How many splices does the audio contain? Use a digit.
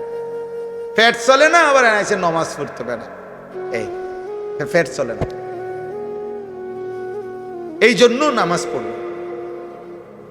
1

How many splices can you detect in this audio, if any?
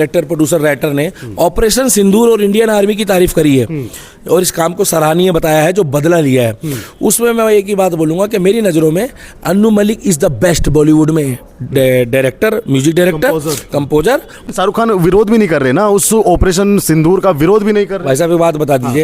1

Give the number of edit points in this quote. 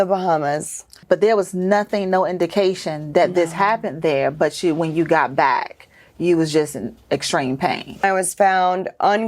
2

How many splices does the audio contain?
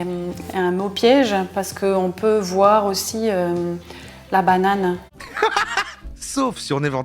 1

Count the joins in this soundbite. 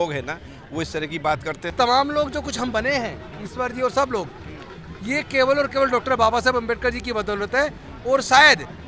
1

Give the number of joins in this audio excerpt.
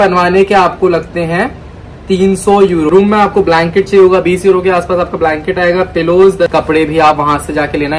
2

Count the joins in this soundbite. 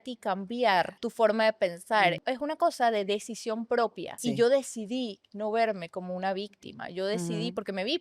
3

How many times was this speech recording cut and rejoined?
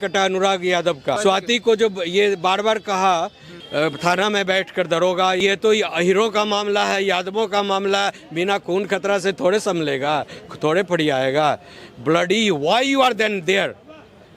3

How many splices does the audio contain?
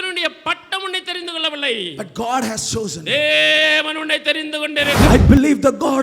1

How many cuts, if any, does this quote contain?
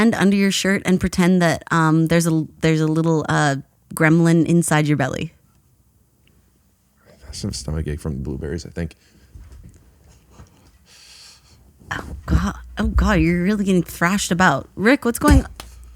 1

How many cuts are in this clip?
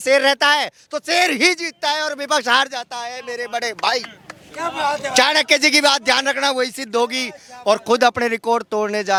0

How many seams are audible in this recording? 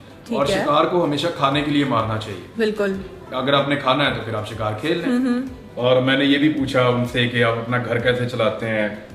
1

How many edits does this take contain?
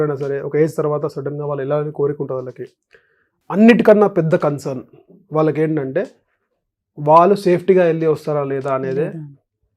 0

